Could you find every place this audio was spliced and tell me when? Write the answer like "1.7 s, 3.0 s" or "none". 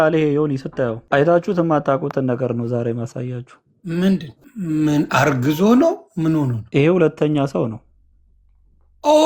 1.0 s, 4.4 s, 6.6 s